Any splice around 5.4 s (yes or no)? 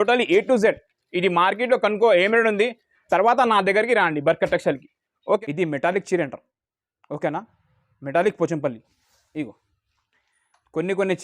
yes